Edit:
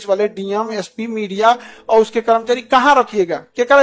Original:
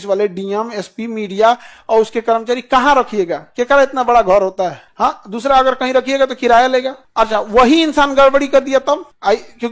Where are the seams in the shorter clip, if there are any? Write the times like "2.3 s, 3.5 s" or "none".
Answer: none